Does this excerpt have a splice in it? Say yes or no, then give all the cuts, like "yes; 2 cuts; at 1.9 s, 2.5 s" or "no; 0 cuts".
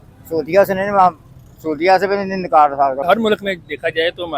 yes; 1 cut; at 3.0 s